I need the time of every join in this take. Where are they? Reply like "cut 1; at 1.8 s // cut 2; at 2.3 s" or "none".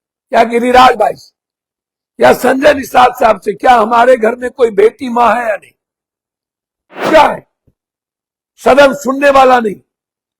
cut 1; at 7.1 s